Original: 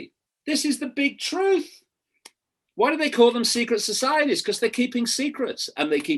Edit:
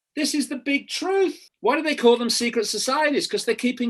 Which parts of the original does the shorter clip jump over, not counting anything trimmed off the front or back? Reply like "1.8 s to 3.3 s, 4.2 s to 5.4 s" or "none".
1.8 s to 2.6 s